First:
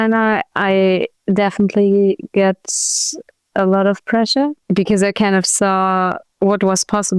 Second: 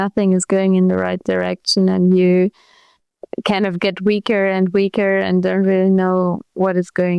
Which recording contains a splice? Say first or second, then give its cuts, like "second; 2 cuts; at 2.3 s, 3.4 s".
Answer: first; 3 cuts; at 1.1 s, 4.6 s, 6.2 s